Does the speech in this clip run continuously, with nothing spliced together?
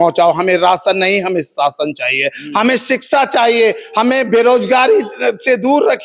yes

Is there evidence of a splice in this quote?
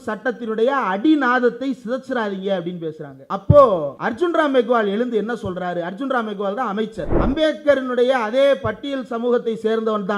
yes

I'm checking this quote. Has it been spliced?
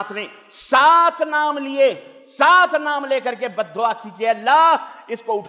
no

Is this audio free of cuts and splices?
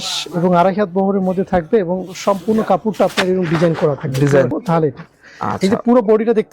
no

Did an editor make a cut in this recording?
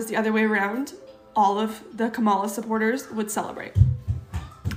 no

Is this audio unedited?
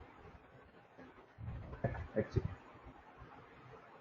no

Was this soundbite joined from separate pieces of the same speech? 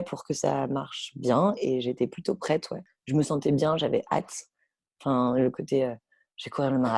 no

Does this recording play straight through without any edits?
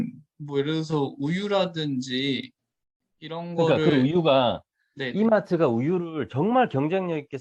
yes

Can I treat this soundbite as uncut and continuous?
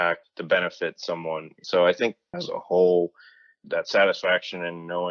yes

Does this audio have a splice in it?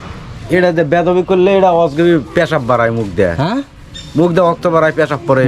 no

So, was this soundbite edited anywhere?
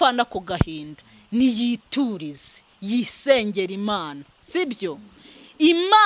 no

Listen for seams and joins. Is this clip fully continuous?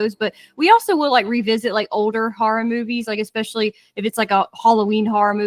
yes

